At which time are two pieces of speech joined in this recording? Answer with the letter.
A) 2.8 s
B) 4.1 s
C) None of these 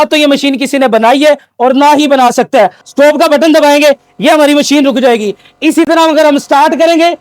A